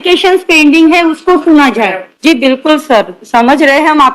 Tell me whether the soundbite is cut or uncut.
cut